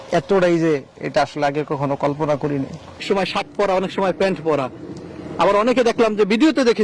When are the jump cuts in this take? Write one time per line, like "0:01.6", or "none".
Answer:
0:03.0